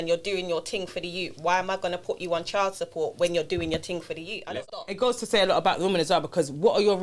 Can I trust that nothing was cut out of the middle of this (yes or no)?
no